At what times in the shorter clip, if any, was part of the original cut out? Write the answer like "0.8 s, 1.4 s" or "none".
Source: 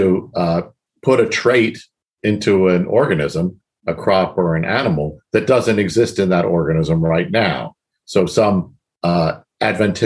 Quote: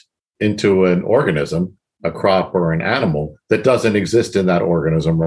none